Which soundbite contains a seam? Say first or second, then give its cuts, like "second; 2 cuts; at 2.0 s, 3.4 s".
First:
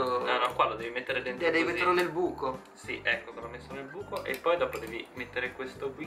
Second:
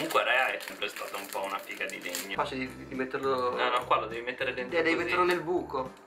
second; 2 cuts; at 0.8 s, 2.3 s